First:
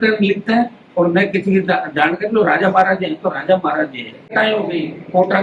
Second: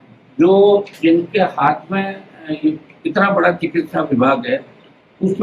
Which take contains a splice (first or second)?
first